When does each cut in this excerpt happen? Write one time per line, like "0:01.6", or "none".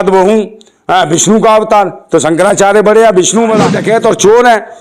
0:03.7